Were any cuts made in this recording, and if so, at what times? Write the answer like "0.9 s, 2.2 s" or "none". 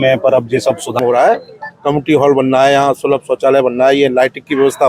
1.0 s